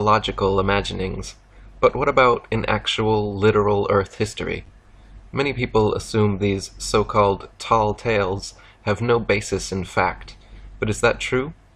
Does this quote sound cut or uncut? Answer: uncut